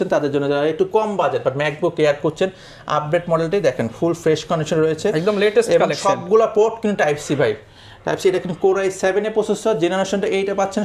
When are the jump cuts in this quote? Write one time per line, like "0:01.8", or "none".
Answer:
none